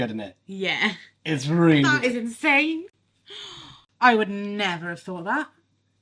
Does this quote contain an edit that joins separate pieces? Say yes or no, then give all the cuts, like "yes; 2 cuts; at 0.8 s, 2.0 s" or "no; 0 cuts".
yes; 1 cut; at 3.8 s